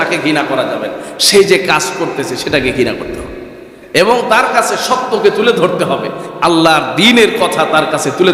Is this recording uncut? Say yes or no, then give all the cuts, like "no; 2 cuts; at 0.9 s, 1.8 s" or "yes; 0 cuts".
yes; 0 cuts